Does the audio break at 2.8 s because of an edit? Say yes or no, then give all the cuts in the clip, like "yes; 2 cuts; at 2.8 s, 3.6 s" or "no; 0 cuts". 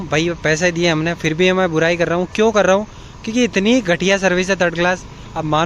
yes; 1 cut; at 2.8 s